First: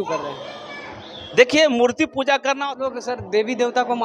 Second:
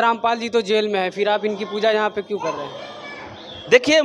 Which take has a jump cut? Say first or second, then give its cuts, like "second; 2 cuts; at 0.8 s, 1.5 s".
first; 1 cut; at 2.6 s